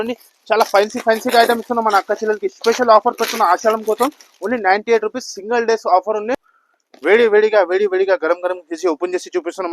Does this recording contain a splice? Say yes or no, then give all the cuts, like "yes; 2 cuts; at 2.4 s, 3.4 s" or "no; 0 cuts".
yes; 1 cut; at 6.5 s